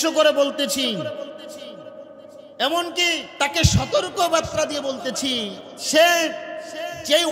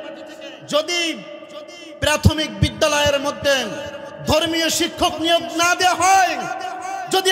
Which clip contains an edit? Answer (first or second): first